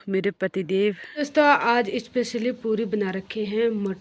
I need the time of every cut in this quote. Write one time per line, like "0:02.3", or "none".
0:01.1